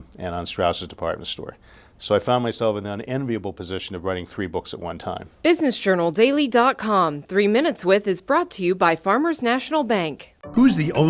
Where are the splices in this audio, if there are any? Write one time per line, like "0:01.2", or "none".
0:05.4